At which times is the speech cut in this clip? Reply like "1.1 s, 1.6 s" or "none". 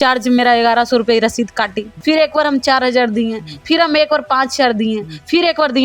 1.8 s